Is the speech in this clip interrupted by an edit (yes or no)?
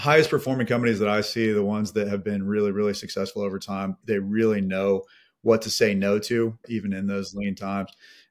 yes